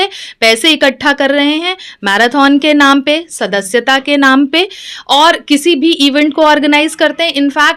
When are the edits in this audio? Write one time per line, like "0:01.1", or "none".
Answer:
none